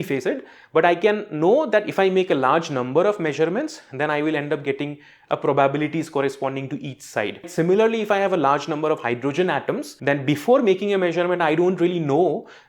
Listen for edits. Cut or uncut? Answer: cut